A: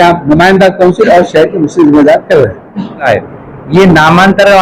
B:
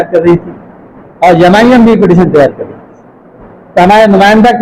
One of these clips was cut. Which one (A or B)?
A